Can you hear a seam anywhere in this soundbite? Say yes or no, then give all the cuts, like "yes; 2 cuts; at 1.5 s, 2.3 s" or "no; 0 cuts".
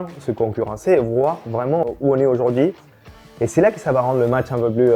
yes; 1 cut; at 1.8 s